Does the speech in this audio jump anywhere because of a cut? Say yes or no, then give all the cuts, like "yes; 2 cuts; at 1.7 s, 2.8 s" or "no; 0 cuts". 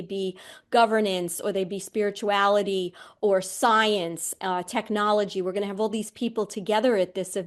no; 0 cuts